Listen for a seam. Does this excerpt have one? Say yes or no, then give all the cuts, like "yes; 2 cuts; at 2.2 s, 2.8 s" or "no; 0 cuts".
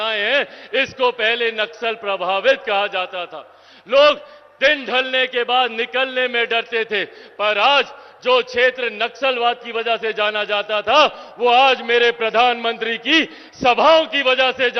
no; 0 cuts